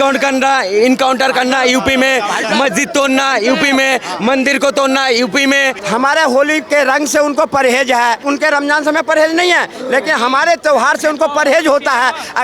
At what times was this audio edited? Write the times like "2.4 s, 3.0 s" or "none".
5.8 s, 8.2 s